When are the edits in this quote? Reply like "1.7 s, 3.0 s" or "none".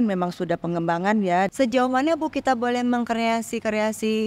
1.5 s